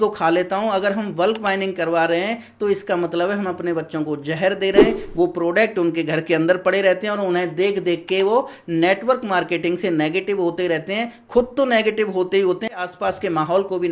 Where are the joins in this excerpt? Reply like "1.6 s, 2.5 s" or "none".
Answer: 12.8 s